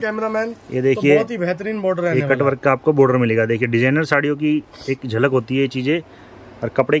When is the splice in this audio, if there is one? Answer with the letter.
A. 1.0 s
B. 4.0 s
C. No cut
C